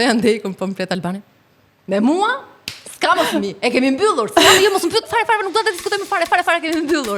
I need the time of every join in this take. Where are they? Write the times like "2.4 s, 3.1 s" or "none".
none